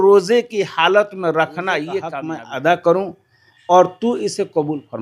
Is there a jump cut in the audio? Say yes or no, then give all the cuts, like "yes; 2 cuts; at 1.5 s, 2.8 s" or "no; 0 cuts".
yes; 1 cut; at 2.2 s